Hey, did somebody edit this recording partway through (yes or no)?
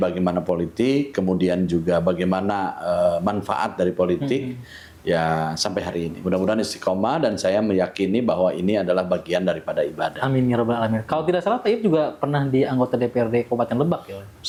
no